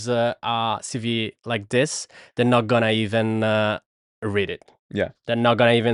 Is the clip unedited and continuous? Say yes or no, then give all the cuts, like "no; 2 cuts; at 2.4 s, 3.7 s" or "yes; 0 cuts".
yes; 0 cuts